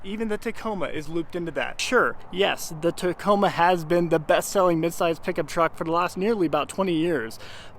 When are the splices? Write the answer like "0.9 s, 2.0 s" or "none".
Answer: 1.8 s